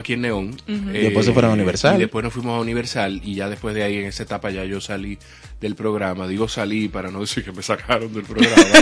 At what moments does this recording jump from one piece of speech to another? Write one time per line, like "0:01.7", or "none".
none